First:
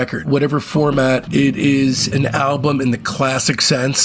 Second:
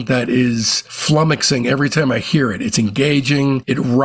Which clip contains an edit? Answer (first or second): first